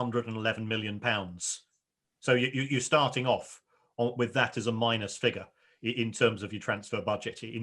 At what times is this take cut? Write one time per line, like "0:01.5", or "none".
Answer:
none